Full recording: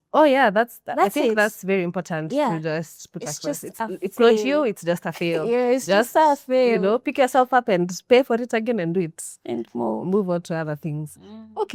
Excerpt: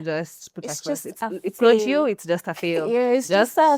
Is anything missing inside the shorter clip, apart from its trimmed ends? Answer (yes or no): no